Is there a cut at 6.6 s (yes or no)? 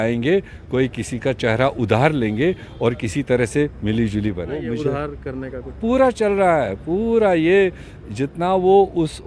no